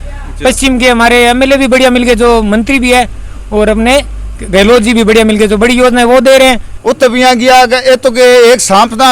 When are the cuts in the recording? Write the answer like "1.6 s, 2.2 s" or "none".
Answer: 6.7 s